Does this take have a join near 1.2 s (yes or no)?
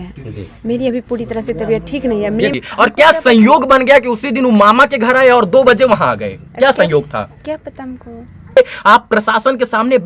no